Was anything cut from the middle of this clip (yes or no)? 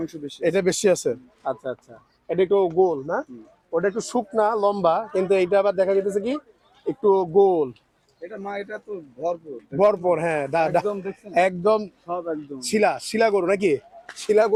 no